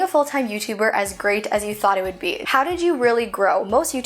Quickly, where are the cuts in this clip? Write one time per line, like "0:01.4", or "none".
0:02.4